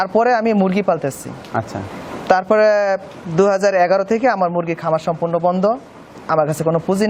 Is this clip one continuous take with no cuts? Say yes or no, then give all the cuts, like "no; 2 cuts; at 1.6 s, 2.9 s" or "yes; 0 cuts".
yes; 0 cuts